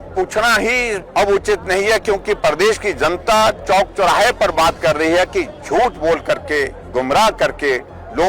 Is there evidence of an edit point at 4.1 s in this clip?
no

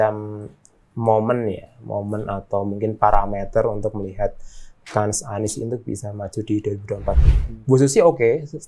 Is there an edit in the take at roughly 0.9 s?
no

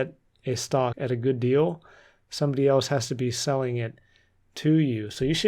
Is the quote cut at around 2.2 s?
no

